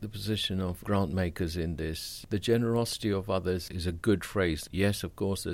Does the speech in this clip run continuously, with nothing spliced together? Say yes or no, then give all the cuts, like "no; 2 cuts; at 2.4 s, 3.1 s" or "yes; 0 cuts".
no; 3 cuts; at 0.8 s, 2.2 s, 4.6 s